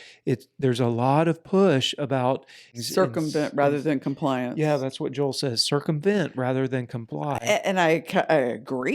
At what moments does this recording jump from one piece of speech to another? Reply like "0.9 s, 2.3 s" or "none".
2.7 s